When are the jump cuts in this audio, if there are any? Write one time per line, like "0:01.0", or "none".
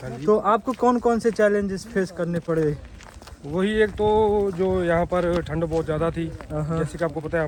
none